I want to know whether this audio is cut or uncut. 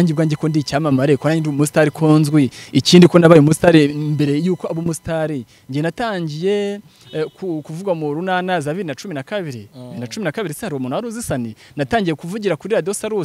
uncut